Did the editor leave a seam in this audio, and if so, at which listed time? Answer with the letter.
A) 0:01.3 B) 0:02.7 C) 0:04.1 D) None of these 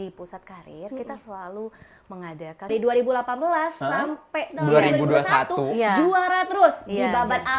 B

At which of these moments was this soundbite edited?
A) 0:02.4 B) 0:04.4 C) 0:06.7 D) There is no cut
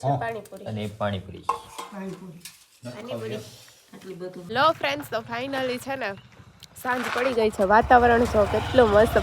B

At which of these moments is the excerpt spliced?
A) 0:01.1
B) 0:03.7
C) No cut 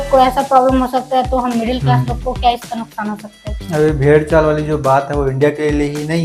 B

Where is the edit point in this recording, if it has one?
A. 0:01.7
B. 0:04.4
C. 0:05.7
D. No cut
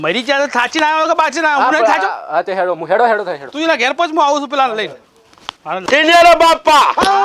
C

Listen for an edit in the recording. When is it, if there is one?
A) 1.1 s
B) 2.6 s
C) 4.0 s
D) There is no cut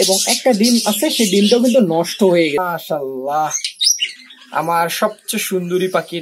B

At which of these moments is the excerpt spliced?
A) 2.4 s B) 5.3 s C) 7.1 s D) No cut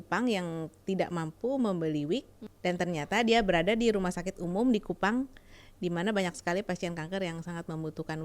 A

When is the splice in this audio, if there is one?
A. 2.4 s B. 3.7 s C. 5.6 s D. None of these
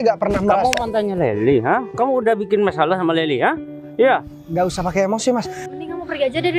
C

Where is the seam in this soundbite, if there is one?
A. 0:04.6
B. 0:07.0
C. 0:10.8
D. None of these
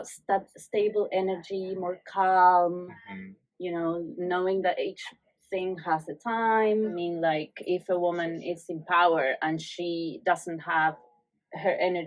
B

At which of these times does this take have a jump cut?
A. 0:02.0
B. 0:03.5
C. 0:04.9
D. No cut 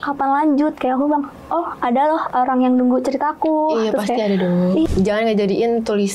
C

